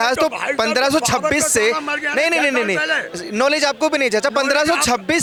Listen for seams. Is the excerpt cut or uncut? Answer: uncut